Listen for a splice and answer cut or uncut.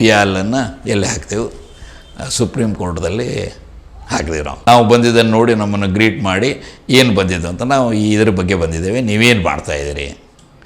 cut